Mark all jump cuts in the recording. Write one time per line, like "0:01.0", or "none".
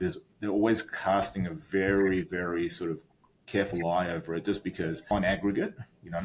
0:05.0